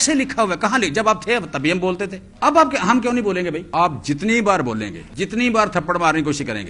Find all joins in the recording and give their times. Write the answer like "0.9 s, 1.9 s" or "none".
2.2 s, 3.6 s, 5.0 s